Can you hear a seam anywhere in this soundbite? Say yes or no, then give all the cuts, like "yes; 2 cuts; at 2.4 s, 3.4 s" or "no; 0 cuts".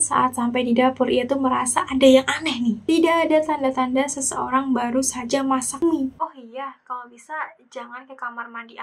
yes; 2 cuts; at 2.8 s, 6.1 s